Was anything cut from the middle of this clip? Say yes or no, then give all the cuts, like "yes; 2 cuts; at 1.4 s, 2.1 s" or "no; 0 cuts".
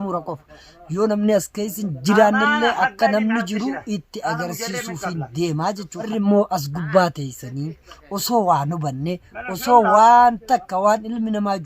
yes; 1 cut; at 6.1 s